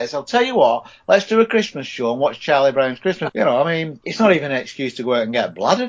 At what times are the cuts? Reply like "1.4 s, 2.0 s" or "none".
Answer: 3.2 s